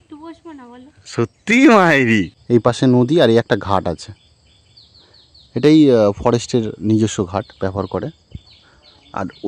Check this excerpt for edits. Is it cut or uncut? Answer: cut